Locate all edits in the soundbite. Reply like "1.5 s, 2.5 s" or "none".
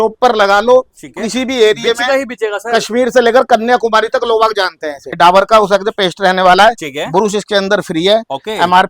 5.1 s